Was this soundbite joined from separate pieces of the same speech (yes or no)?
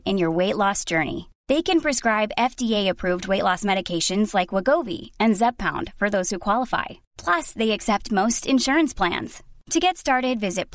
no